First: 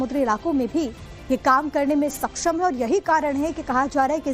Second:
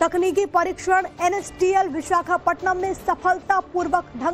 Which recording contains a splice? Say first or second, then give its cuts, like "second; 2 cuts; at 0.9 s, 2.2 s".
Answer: first; 1 cut; at 1.4 s